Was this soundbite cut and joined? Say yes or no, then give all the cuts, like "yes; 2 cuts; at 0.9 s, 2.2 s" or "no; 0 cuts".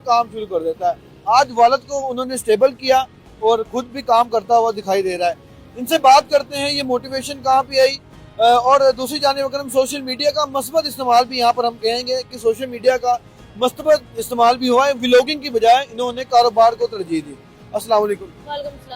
no; 0 cuts